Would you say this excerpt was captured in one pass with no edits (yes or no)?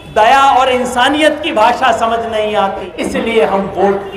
no